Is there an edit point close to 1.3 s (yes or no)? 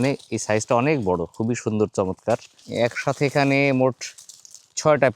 no